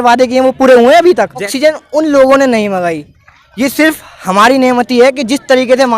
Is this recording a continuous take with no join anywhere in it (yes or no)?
no